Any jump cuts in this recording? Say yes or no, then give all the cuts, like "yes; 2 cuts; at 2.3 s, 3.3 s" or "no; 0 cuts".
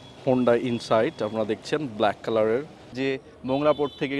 yes; 1 cut; at 3.0 s